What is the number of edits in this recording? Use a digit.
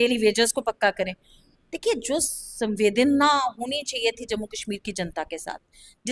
0